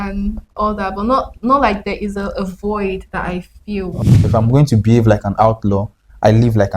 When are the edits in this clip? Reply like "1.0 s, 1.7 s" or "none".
4.1 s